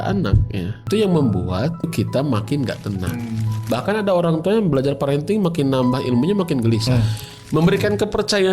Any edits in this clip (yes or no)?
yes